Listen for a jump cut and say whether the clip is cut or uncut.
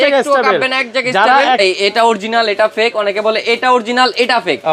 cut